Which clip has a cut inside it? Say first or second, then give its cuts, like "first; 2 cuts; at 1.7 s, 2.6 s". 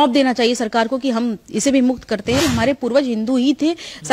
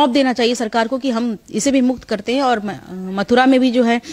first; 1 cut; at 2.4 s